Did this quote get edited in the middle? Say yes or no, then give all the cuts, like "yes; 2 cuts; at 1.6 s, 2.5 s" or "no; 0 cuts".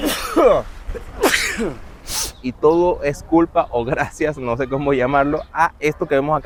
no; 0 cuts